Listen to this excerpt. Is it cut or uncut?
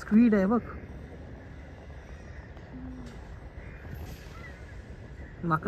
uncut